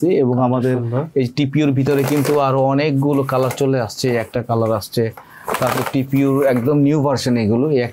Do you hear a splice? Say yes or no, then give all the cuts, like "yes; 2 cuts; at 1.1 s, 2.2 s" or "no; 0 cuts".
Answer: no; 0 cuts